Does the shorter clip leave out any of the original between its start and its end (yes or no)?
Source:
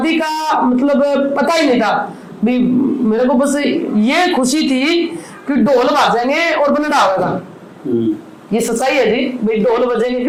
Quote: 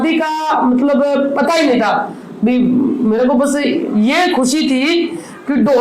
no